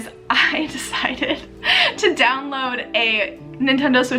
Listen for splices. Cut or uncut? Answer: uncut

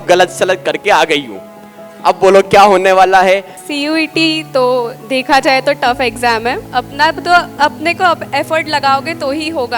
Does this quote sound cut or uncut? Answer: cut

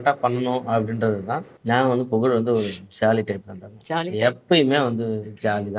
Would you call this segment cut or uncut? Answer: cut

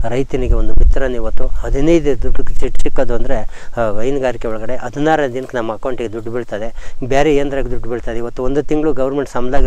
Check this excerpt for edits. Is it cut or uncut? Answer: uncut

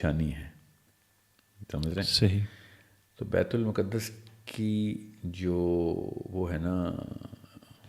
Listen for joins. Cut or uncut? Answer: uncut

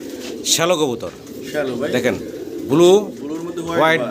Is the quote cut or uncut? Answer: uncut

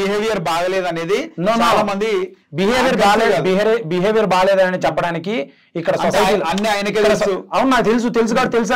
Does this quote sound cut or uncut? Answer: uncut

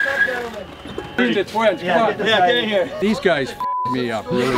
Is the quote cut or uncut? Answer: cut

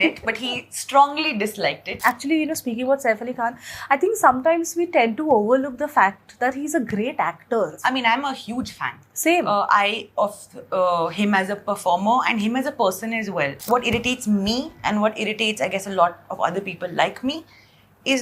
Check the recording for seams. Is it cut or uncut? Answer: cut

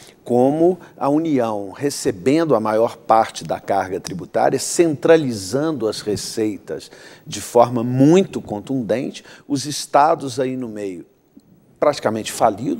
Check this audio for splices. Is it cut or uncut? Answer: uncut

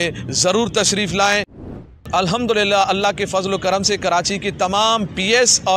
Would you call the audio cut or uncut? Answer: cut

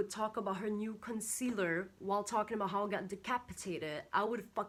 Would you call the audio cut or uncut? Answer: uncut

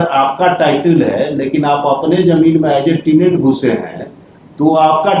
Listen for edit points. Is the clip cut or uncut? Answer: uncut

